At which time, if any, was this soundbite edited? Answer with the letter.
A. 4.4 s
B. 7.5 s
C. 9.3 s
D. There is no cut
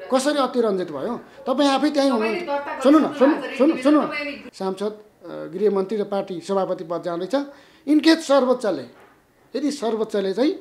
A